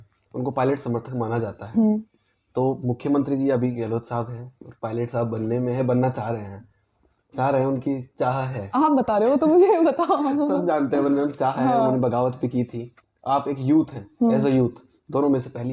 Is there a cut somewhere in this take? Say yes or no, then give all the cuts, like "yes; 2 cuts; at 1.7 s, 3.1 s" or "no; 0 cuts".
no; 0 cuts